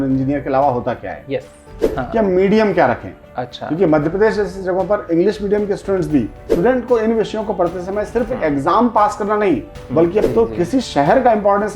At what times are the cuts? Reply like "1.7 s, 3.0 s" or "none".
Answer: 2.0 s, 6.4 s, 10.3 s

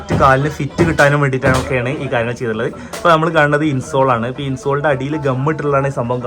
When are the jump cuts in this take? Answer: none

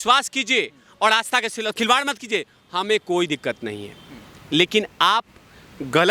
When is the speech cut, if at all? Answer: none

